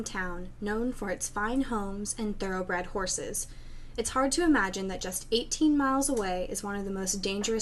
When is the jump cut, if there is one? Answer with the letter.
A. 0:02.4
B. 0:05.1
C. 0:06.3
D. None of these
A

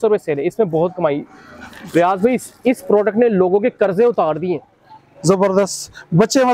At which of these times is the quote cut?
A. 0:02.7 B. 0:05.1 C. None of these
C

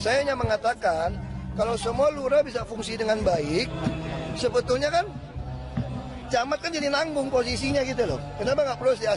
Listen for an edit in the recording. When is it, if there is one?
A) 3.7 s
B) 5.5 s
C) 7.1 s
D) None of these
D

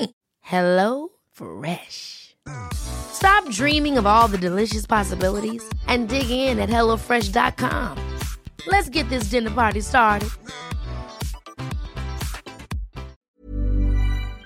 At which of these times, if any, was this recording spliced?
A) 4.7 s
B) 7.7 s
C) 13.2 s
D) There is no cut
C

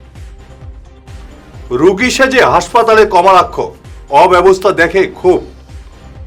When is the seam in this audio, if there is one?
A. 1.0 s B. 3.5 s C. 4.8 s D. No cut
A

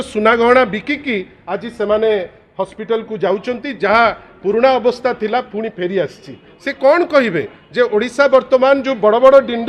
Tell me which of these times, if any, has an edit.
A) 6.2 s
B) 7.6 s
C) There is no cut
C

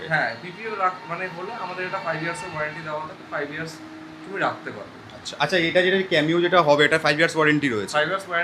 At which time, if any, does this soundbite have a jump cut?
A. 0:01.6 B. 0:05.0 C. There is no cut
C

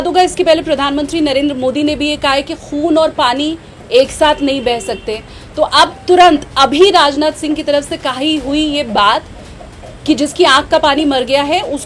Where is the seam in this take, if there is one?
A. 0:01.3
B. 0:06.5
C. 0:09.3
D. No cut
D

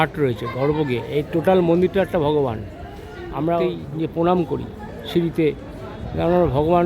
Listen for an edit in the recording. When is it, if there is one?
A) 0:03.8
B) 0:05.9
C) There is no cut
A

